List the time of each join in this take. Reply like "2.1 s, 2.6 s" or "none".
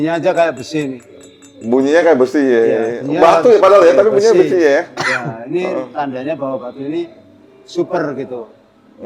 none

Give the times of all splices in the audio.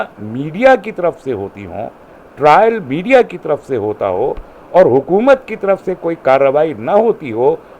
none

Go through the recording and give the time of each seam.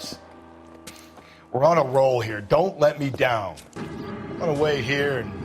3.7 s

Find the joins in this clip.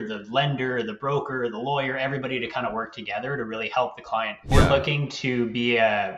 4.5 s

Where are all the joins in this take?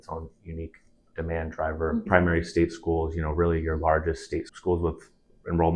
2.1 s

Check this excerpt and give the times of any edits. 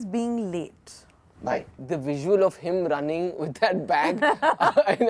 1.8 s

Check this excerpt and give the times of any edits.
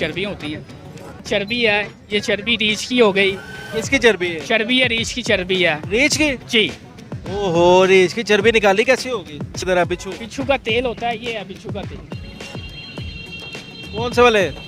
1.2 s, 9.6 s

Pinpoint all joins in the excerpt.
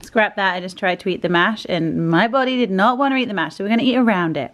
none

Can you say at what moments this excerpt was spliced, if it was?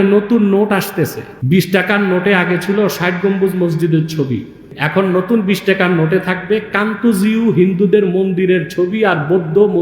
1.3 s, 4.7 s

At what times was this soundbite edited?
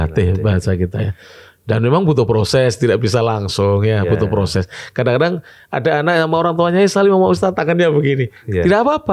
none

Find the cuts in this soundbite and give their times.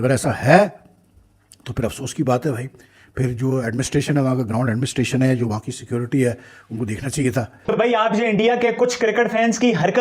7.6 s

